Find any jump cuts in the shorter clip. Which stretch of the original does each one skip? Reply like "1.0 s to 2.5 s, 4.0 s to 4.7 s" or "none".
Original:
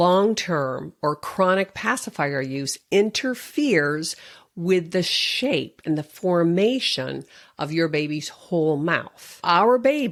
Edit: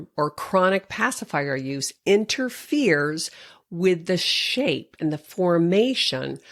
none